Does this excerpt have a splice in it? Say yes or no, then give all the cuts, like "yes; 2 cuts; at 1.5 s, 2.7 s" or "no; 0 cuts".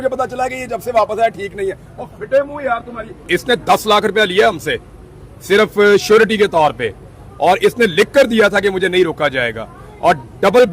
yes; 1 cut; at 3.2 s